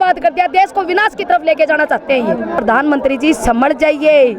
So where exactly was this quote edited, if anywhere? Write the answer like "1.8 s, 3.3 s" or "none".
2.6 s